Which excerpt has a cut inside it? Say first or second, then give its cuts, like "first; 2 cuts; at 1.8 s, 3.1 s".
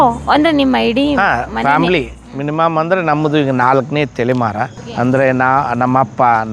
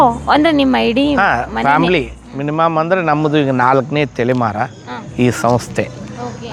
first; 1 cut; at 4.8 s